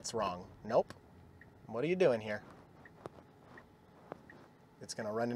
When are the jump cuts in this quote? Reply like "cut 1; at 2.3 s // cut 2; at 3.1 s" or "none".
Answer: none